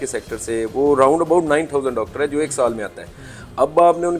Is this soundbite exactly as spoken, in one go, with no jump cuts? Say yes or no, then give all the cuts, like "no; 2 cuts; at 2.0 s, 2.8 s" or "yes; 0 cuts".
yes; 0 cuts